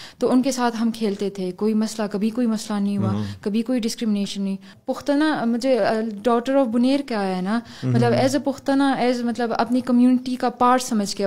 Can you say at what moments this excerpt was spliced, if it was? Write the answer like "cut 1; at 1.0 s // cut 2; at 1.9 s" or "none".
cut 1; at 4.7 s